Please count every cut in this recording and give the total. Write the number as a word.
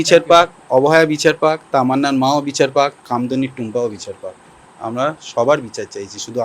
zero